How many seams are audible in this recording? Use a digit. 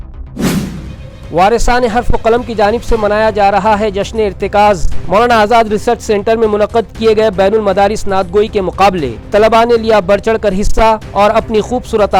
1